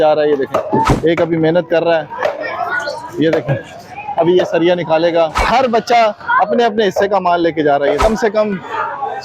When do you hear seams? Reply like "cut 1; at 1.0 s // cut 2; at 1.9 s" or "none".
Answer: cut 1; at 0.9 s // cut 2; at 5.4 s // cut 3; at 8.0 s